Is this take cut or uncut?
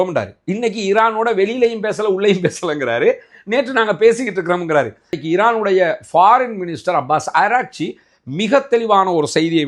cut